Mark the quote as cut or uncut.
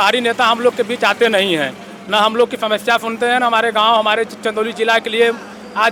uncut